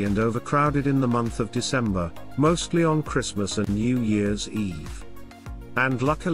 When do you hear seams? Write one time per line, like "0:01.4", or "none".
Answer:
none